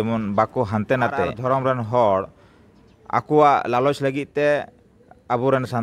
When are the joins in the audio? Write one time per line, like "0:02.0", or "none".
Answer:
0:01.4